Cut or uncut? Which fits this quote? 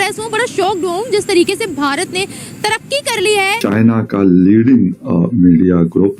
cut